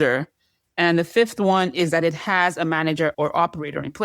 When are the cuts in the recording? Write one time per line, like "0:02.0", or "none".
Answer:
0:03.1